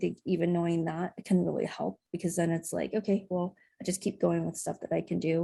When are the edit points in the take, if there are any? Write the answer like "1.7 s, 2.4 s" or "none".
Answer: none